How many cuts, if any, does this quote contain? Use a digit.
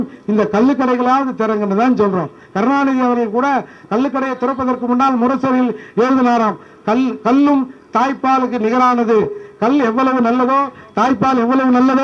0